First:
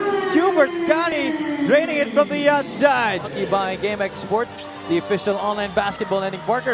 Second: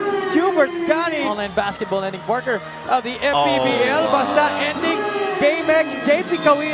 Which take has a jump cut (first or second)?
second